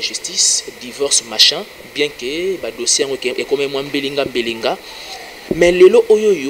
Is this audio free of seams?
yes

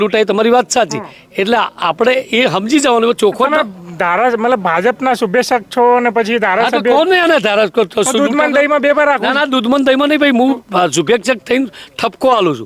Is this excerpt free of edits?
yes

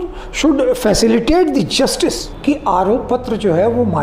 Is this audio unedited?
no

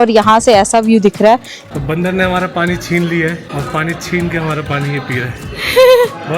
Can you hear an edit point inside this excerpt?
yes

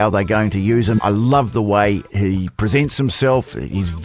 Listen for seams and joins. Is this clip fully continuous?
no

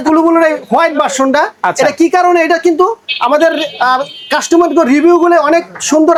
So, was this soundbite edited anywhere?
no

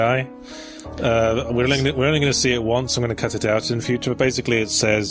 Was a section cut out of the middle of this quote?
yes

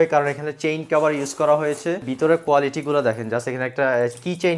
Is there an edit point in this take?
yes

